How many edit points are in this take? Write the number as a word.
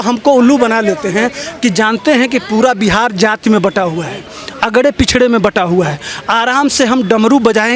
zero